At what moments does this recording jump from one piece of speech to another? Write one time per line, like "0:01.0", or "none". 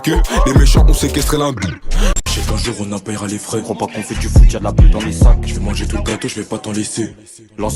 0:02.2